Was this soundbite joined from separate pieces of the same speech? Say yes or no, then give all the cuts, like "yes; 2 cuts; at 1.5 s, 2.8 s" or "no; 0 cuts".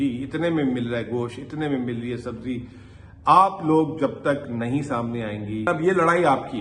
yes; 1 cut; at 5.7 s